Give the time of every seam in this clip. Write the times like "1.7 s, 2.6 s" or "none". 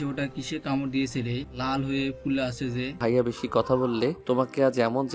1.5 s, 2.9 s, 4.2 s